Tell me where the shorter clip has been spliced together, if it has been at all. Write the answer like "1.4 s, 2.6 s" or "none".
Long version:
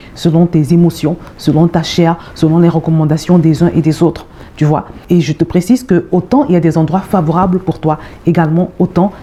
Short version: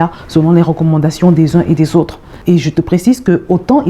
2.3 s